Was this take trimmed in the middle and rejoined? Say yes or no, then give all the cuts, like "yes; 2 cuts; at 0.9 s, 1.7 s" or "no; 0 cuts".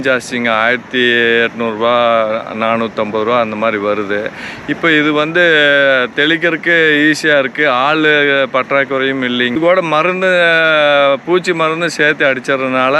yes; 1 cut; at 9.6 s